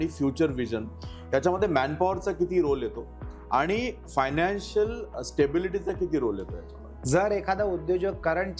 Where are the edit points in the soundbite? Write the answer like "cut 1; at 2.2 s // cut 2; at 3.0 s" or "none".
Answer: none